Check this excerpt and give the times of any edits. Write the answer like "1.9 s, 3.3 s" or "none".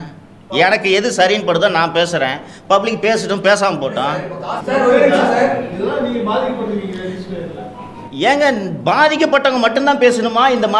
4.6 s